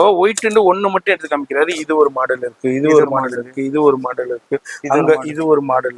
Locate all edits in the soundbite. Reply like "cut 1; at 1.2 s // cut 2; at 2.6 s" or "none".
none